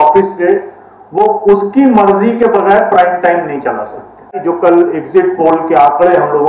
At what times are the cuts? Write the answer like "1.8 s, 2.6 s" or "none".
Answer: 4.3 s